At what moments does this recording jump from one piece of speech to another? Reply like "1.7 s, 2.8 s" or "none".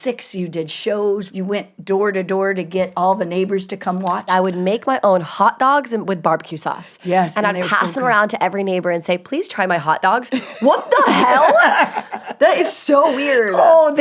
1.3 s, 4.3 s